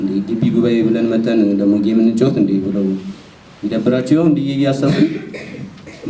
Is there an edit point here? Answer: no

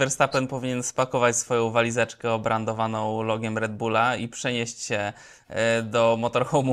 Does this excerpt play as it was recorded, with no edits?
yes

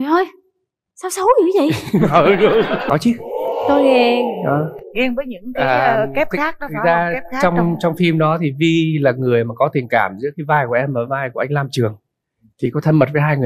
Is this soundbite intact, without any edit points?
no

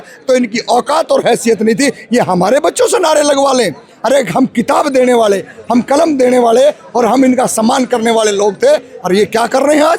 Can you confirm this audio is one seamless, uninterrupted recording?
yes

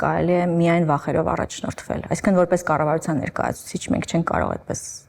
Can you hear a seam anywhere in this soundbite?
no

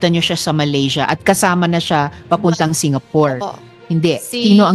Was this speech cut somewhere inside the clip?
yes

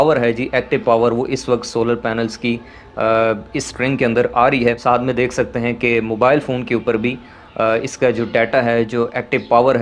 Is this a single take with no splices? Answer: no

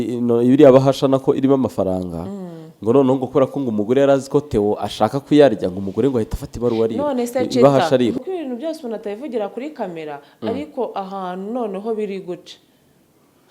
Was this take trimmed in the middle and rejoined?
yes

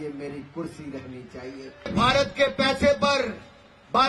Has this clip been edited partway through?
yes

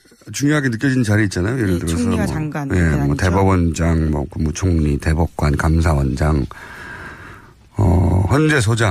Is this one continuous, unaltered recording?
yes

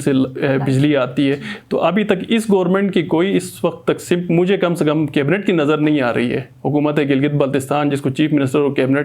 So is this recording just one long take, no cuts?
yes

